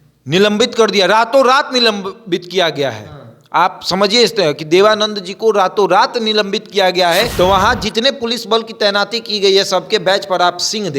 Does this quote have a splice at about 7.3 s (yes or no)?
yes